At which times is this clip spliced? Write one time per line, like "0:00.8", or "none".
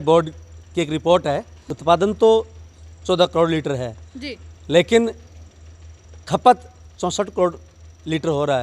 0:01.6